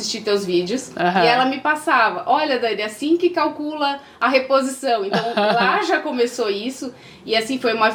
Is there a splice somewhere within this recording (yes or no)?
no